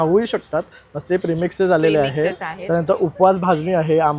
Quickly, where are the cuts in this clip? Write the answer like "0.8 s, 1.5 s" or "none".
none